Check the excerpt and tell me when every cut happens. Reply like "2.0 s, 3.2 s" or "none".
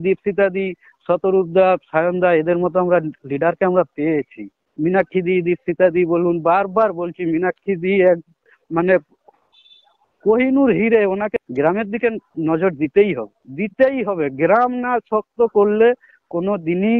4.6 s, 11.4 s